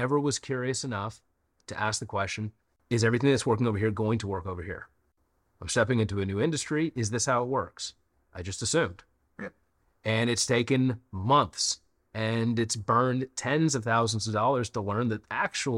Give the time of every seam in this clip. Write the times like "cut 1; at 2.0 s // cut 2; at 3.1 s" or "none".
cut 1; at 2.7 s

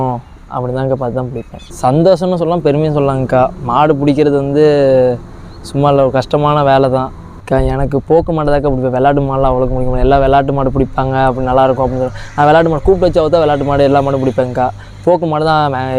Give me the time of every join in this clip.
cut 1; at 1.6 s // cut 2; at 7.2 s

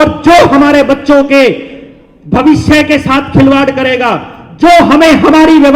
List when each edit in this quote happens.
none

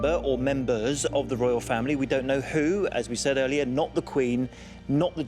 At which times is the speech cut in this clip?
none

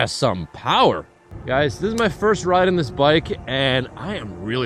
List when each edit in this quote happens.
none

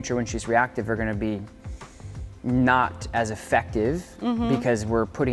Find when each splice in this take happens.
none

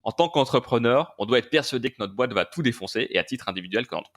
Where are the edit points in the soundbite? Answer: none

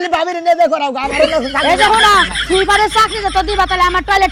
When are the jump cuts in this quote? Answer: none

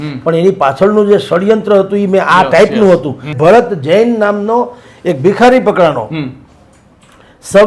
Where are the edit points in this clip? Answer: cut 1; at 3.3 s

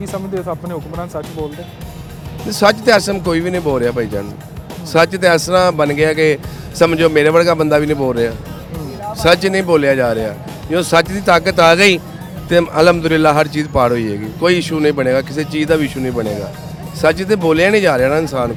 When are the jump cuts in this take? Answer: none

